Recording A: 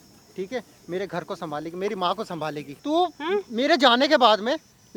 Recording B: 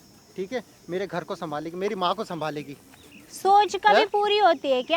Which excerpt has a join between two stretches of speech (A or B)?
A